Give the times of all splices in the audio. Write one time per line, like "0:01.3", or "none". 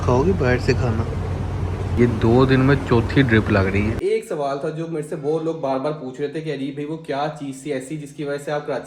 0:01.9
0:04.0